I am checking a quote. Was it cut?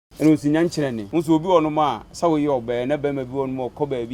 yes; 2 cuts; at 1.0 s, 2.1 s

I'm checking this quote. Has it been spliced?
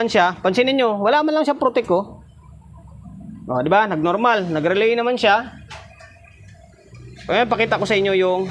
no; 0 cuts

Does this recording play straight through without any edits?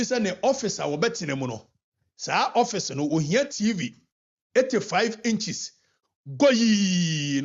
yes; 0 cuts

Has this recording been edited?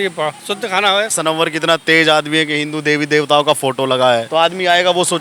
yes; 2 cuts; at 1.1 s, 4.3 s

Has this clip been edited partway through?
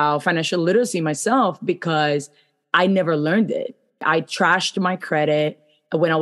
yes; 1 cut; at 4.0 s

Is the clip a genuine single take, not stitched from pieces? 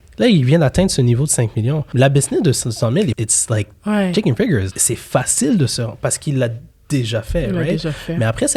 no; 3 cuts; at 1.8 s, 3.2 s, 4.7 s

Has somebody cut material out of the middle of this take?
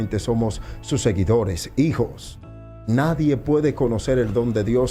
no; 0 cuts

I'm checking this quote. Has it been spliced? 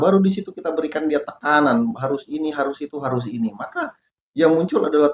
no; 0 cuts

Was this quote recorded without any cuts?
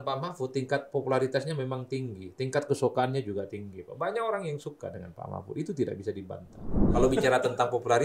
no; 1 cut; at 6.9 s

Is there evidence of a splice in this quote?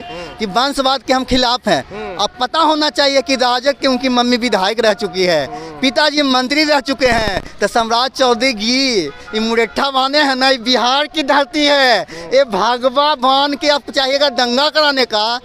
no; 0 cuts

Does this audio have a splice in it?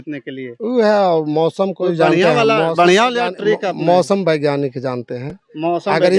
no; 0 cuts

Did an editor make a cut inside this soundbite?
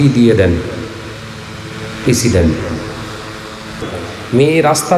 yes; 1 cut; at 3.9 s

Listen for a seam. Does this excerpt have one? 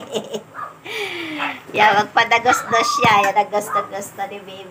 no; 0 cuts

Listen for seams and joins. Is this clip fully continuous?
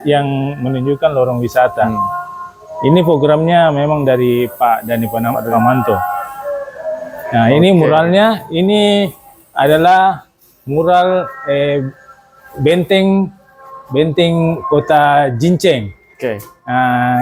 yes; 0 cuts

